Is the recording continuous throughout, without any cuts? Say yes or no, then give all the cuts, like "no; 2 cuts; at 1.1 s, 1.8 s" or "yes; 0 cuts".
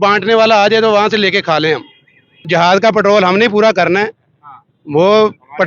no; 1 cut; at 2.5 s